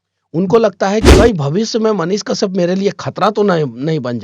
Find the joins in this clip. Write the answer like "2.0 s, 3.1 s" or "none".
1.1 s